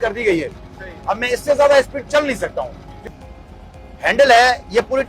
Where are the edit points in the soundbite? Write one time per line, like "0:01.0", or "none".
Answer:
0:03.1